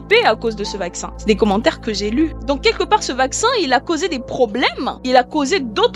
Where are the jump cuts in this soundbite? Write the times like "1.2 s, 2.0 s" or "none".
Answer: 1.1 s, 2.4 s, 4.9 s